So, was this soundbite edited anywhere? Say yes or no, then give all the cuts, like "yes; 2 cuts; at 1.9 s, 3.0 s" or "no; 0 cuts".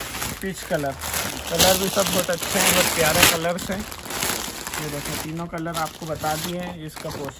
no; 0 cuts